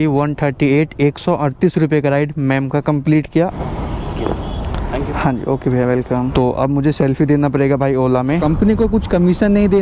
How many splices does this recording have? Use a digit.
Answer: 3